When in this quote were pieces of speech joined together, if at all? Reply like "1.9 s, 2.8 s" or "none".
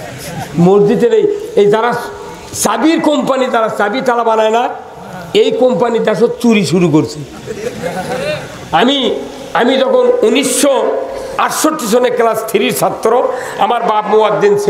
none

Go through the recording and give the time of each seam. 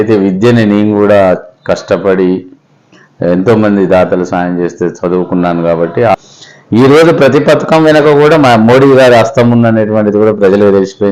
6.1 s

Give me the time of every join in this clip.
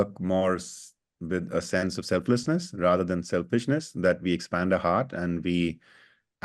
none

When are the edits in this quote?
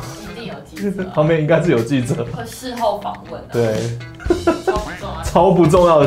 none

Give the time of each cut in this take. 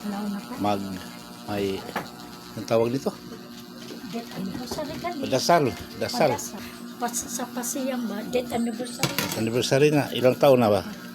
6.6 s

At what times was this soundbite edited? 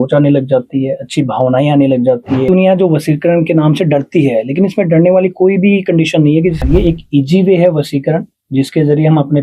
2.5 s, 6.6 s

